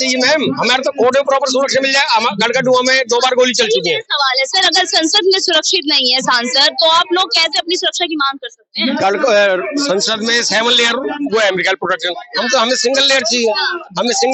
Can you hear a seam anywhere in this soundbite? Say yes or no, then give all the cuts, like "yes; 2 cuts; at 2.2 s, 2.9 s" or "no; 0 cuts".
no; 0 cuts